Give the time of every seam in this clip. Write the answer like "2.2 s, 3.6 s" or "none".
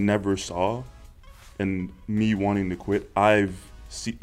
none